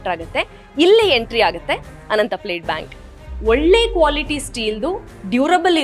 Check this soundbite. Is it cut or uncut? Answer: cut